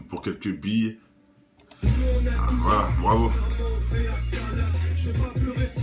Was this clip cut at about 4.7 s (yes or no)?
no